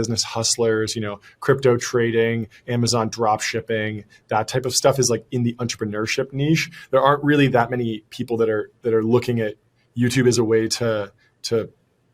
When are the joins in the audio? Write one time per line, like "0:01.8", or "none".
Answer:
none